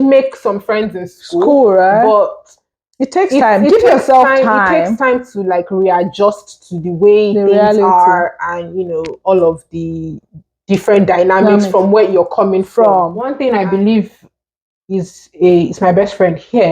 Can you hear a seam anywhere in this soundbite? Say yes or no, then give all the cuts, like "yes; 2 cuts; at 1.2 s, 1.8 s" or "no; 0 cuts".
yes; 1 cut; at 13.3 s